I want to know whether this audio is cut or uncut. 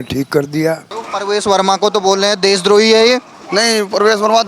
cut